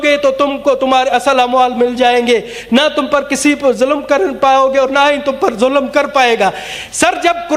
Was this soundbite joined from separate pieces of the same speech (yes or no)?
no